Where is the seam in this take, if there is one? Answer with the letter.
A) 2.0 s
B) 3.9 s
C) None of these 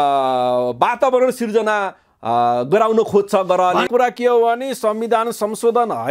B